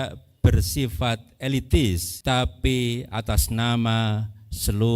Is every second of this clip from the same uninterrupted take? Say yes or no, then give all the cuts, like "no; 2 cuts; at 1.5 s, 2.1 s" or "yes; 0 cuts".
no; 1 cut; at 2.1 s